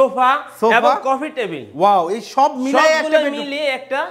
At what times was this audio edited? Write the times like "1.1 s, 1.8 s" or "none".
none